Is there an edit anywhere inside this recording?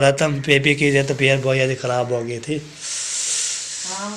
no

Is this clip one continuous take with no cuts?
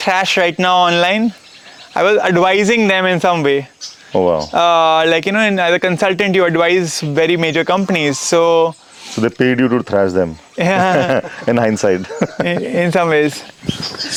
yes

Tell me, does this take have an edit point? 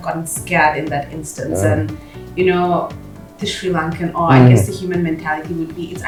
no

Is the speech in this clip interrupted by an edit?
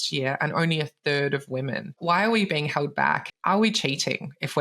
yes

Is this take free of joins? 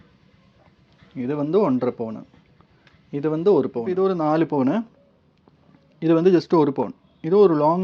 no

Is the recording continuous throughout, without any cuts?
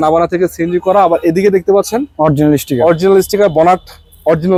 yes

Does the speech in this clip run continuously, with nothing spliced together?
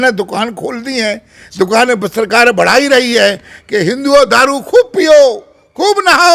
yes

